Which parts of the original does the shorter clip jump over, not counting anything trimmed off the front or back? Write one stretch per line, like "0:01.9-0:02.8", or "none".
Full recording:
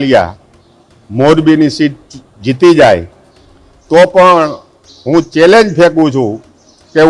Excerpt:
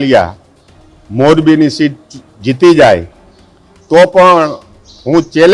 none